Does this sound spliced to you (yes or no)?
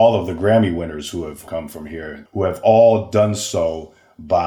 yes